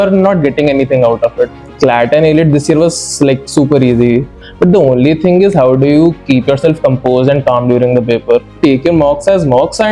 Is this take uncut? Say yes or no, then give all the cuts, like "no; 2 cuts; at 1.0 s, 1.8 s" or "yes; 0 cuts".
no; 3 cuts; at 1.6 s, 4.4 s, 8.6 s